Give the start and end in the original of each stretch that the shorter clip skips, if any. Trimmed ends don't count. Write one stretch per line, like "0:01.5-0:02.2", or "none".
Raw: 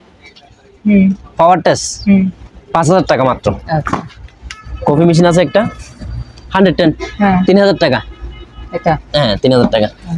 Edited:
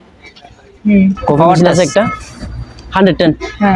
0:01.6-0:05.2